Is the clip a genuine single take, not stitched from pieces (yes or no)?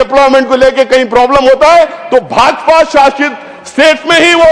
yes